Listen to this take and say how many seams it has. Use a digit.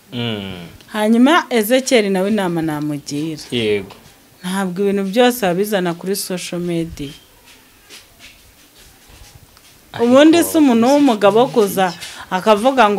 0